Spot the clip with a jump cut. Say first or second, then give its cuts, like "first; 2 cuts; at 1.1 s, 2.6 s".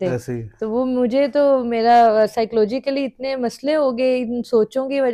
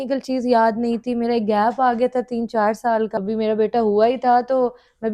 second; 1 cut; at 3.2 s